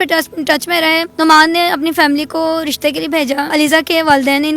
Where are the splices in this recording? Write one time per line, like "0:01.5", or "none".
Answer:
0:01.1
0:03.5